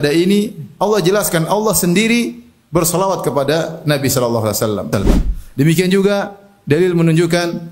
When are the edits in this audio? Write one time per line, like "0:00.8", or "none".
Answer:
0:04.9